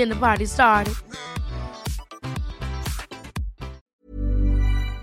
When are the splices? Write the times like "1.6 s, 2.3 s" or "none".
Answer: 3.9 s